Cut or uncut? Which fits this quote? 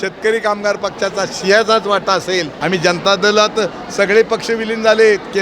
cut